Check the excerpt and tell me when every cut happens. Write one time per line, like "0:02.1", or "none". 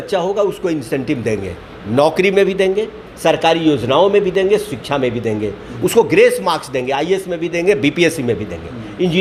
none